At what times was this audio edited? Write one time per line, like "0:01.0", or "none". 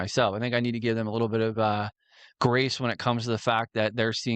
none